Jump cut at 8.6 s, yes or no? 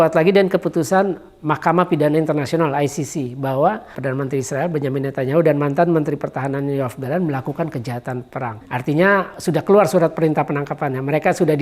yes